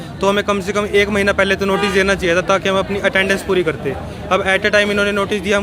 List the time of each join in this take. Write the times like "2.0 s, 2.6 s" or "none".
none